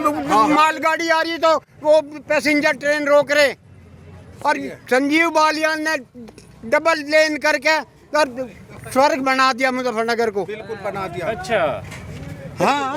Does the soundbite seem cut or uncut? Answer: uncut